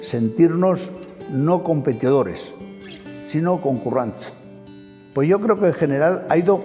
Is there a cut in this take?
yes; 1 cut; at 4.8 s

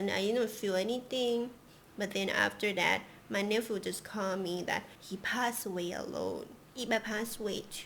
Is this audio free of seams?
no; 2 cuts; at 5.0 s, 6.7 s

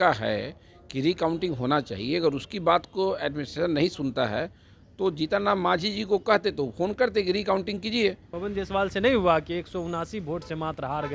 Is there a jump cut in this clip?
yes; 1 cut; at 8.3 s

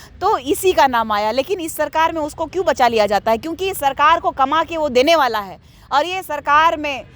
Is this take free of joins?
yes; 0 cuts

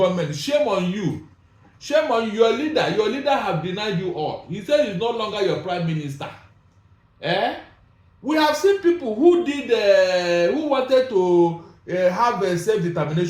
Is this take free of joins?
yes; 0 cuts

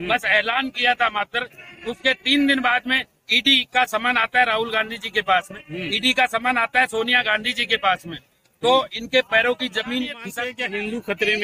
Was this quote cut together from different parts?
yes; 1 cut; at 10.2 s

